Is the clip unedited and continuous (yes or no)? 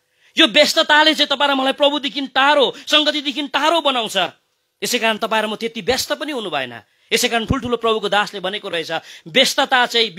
yes